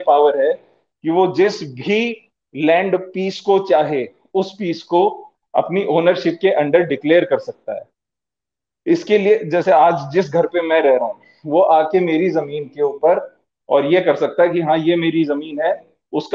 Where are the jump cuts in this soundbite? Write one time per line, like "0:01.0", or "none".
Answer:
none